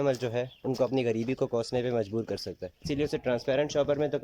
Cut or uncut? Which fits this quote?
uncut